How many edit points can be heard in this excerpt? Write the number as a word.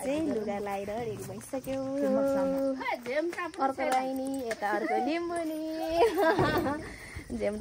zero